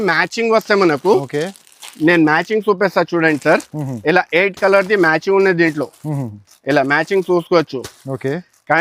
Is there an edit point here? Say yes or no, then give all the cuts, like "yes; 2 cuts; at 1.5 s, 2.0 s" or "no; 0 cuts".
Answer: no; 0 cuts